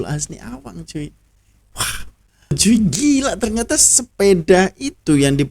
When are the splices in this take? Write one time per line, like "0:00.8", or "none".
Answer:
0:02.6